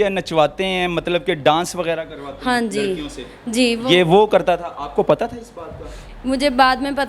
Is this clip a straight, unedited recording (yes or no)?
yes